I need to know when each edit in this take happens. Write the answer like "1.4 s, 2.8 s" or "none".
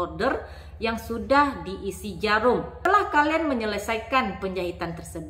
2.8 s